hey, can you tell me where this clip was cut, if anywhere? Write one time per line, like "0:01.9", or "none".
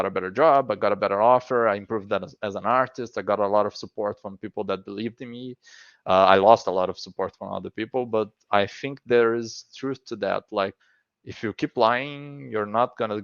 0:10.8